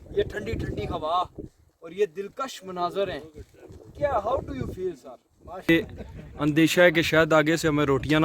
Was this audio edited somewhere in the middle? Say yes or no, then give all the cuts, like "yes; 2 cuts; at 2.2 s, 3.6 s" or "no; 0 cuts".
yes; 1 cut; at 5.7 s